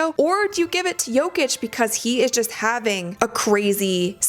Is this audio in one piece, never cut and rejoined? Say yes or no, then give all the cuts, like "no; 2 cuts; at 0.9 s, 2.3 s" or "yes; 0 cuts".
yes; 0 cuts